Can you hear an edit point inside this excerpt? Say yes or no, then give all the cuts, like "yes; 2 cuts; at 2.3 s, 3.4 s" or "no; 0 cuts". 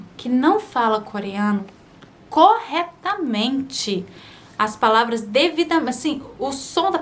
no; 0 cuts